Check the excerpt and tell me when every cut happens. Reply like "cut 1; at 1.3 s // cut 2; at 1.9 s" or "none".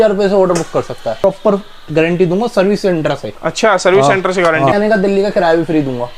cut 1; at 1.2 s // cut 2; at 4.7 s